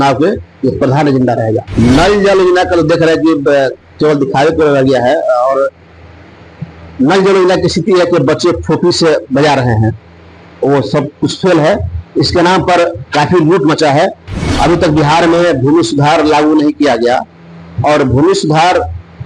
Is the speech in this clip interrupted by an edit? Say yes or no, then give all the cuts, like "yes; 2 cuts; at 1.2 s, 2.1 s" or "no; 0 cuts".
yes; 2 cuts; at 1.7 s, 14.3 s